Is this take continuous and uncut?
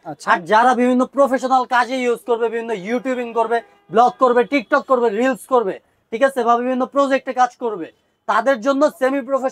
yes; 0 cuts

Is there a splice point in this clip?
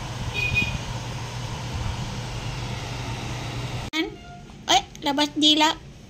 yes; 1 cut; at 3.9 s

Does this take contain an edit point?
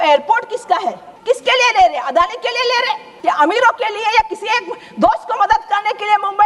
yes; 2 cuts; at 1.1 s, 3.1 s

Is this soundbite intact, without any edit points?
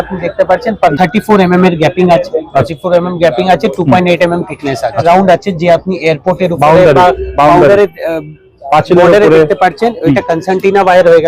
no; 3 cuts; at 0.9 s, 2.7 s, 5.0 s

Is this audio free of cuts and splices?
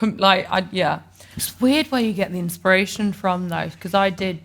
no; 1 cut; at 1.3 s

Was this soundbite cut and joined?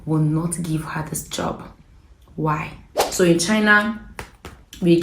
yes; 1 cut; at 3.0 s

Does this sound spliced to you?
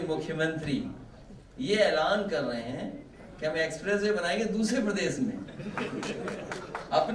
no; 0 cuts

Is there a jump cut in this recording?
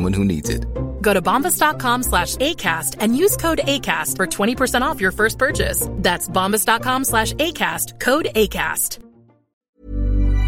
yes; 1 cut; at 9.5 s

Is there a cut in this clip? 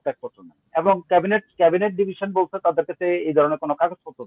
no; 0 cuts

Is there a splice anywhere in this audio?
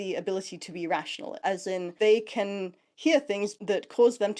yes; 2 cuts; at 1.3 s, 3.5 s

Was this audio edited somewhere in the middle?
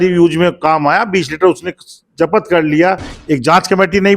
yes; 1 cut; at 3.1 s

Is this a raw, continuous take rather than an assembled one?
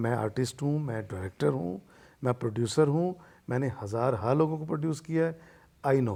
yes; 0 cuts

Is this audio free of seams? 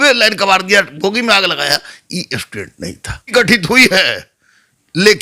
no; 1 cut; at 3.2 s

